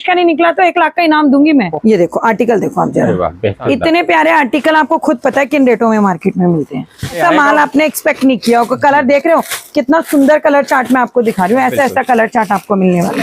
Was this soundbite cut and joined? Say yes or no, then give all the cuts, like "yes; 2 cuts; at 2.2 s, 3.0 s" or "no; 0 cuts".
yes; 3 cuts; at 1.7 s, 3.6 s, 7.2 s